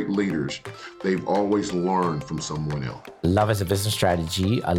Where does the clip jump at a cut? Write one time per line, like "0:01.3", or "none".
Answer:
0:03.0